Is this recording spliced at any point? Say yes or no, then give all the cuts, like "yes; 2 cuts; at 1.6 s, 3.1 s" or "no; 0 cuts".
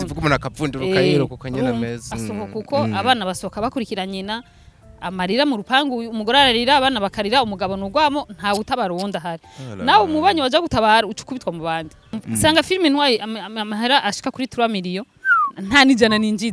yes; 1 cut; at 12.2 s